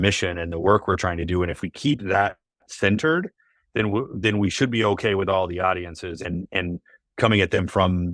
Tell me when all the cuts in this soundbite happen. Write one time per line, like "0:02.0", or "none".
none